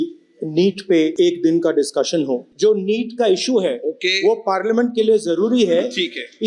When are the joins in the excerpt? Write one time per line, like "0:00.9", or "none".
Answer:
0:01.1
0:02.5